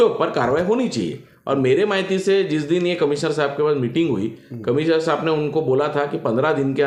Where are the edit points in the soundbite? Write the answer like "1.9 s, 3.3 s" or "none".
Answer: none